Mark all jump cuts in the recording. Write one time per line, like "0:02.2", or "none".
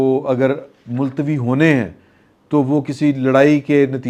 none